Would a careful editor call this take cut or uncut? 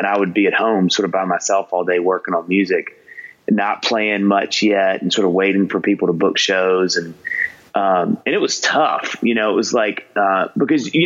uncut